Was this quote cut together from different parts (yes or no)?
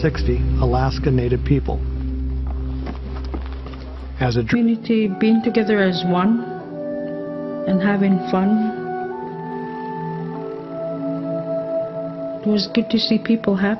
no